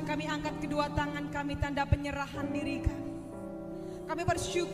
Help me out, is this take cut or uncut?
uncut